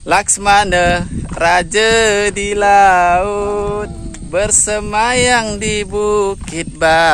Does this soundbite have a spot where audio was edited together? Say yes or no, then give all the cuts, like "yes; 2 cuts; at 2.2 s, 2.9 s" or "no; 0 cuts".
no; 0 cuts